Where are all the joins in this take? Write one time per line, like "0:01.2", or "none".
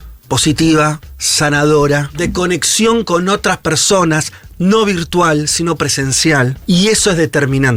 0:02.1
0:06.6

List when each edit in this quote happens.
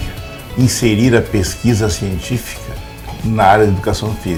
none

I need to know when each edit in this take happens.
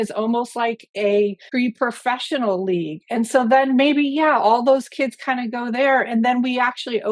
0:01.4

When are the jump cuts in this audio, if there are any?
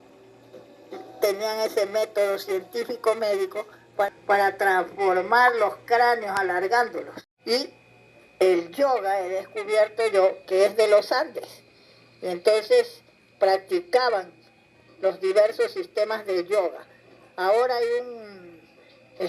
none

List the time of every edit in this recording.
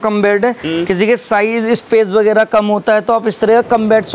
none

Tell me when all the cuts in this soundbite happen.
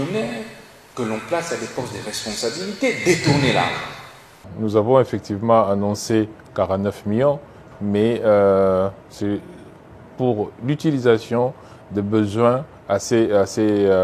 0:04.5

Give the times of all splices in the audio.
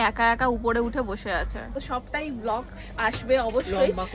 0:01.8

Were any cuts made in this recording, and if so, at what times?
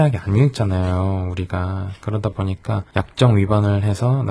none

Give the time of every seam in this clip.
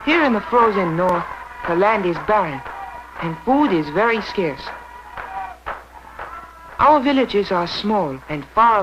none

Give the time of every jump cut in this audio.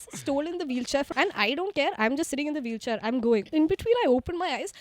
0:01.1
0:03.5

